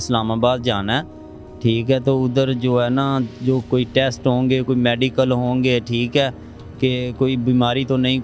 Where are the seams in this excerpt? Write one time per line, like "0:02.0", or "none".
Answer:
none